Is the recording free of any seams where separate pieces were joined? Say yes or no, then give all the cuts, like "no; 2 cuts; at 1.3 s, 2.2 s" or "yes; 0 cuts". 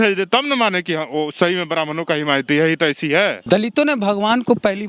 no; 1 cut; at 3.4 s